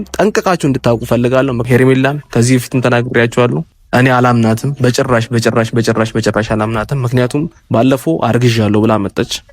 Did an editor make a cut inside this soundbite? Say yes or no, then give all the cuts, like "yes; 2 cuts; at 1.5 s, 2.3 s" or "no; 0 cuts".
yes; 2 cuts; at 1.6 s, 3.7 s